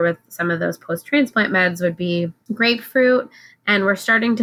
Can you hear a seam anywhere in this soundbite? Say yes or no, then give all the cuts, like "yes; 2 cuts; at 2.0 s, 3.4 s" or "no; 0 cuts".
no; 0 cuts